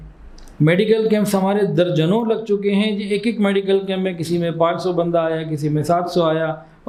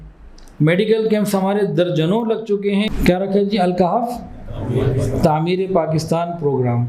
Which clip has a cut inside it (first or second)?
second